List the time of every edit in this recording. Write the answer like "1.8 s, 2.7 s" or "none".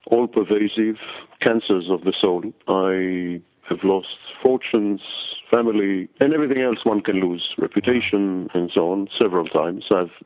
none